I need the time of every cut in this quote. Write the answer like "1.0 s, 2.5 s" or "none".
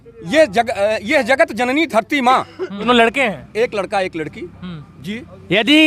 2.9 s